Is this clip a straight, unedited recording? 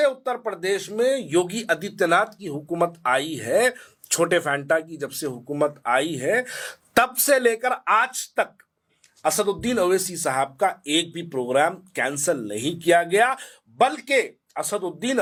yes; 0 cuts

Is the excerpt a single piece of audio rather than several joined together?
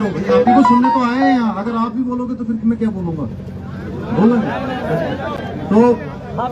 yes; 0 cuts

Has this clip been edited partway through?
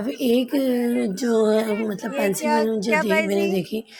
no; 0 cuts

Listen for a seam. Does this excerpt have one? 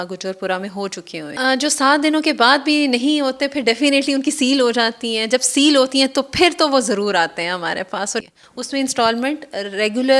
yes; 2 cuts; at 1.3 s, 8.2 s

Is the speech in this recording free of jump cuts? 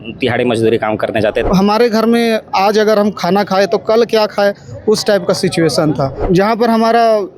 no; 2 cuts; at 1.5 s, 6.2 s

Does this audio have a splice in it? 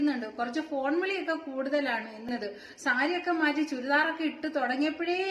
yes; 1 cut; at 2.3 s

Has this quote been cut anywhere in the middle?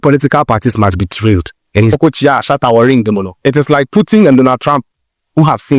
yes; 1 cut; at 1.9 s

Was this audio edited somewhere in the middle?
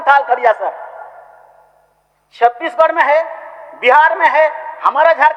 no; 0 cuts

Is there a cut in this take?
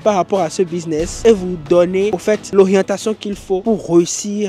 no; 0 cuts

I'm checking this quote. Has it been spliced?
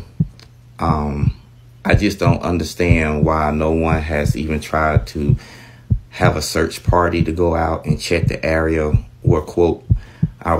no; 0 cuts

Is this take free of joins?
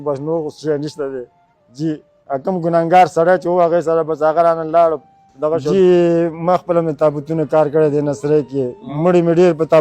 no; 1 cut; at 5.7 s

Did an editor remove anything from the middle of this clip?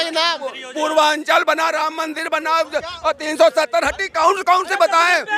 no; 0 cuts

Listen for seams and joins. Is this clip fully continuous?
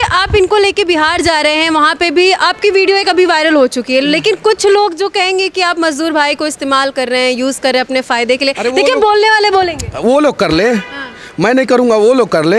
yes; 0 cuts

